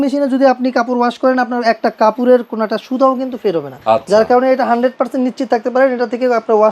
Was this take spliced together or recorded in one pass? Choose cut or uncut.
cut